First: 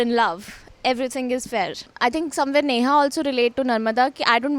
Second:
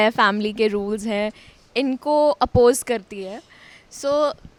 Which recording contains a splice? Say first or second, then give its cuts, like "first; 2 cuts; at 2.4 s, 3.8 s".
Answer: first; 1 cut; at 1.8 s